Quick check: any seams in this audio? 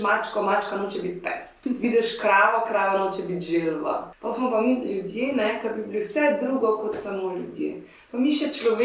yes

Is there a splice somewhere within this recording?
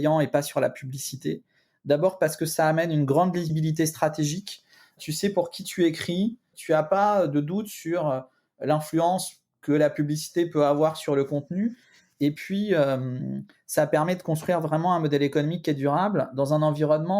yes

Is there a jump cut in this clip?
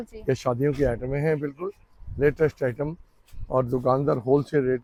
no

